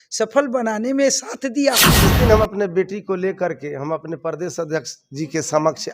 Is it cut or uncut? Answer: cut